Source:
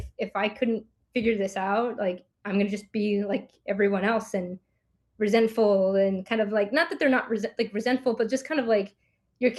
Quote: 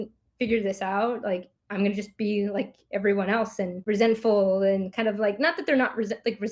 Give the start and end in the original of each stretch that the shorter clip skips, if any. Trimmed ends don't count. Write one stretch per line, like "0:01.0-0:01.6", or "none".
0:04.5-0:05.1

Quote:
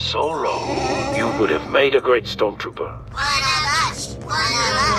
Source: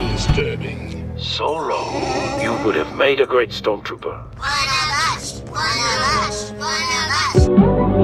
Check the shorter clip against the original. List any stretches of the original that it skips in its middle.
none

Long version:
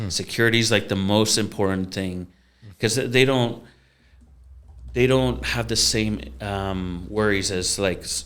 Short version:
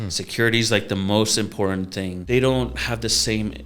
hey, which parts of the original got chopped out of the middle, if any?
0:02.2-0:04.8

